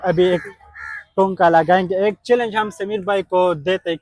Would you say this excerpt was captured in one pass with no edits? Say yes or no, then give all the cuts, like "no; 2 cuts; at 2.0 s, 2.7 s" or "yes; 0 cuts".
yes; 0 cuts